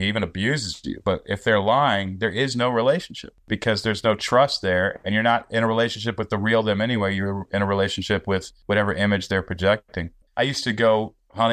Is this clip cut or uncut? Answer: cut